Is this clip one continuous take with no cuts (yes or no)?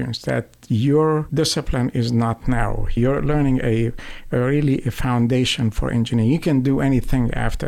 no